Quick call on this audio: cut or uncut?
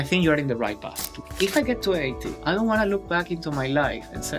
cut